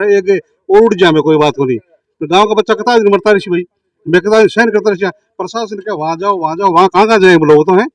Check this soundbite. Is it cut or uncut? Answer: uncut